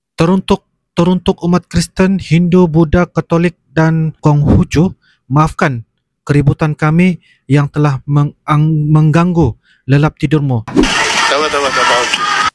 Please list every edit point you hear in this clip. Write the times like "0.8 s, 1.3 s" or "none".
10.8 s